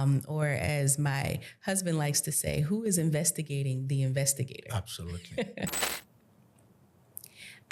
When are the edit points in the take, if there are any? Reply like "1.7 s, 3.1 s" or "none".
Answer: 5.9 s